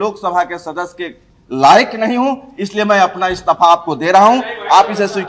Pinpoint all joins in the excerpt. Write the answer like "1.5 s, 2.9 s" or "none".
none